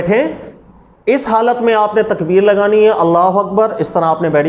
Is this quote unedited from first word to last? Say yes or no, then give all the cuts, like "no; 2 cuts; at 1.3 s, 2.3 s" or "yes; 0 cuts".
yes; 0 cuts